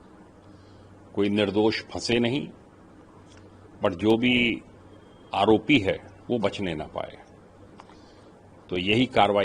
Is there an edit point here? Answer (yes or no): no